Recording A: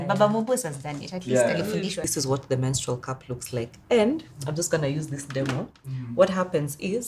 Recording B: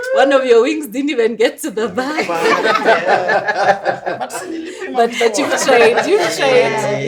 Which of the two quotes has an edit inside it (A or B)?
A